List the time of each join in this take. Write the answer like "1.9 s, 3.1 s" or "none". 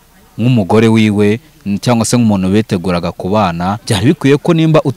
3.8 s